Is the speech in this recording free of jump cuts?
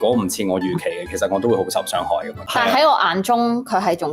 no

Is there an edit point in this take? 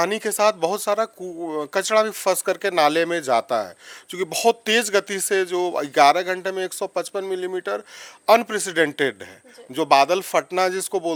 no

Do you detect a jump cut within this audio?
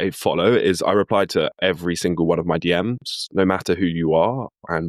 no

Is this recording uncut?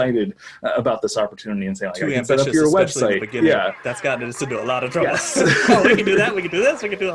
yes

